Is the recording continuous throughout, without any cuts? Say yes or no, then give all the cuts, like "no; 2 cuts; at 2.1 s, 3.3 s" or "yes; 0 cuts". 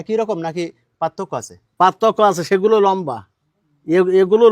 yes; 0 cuts